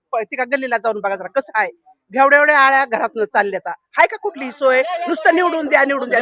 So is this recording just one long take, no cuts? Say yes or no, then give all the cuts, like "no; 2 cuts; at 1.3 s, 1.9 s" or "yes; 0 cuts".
yes; 0 cuts